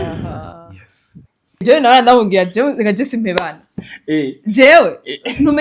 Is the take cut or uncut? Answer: cut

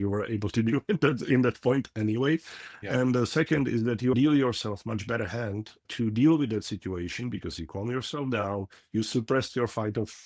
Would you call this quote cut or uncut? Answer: cut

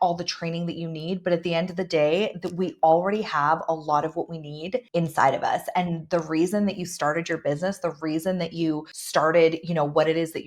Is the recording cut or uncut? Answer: cut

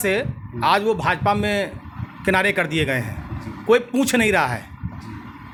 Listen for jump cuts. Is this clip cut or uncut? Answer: uncut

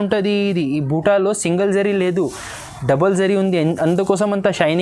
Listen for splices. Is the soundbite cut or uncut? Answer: uncut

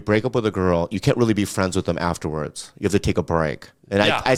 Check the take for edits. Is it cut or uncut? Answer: uncut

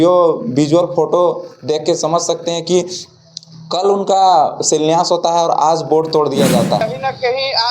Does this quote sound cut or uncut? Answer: cut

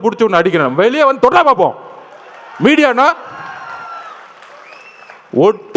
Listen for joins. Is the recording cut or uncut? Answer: uncut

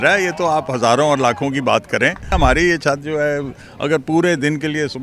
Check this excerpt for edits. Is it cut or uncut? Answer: cut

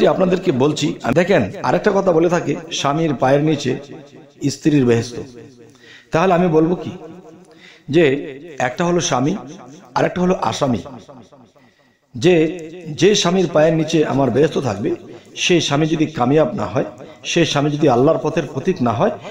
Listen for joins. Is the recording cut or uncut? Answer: cut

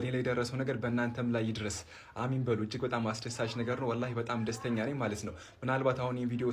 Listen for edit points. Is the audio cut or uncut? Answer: uncut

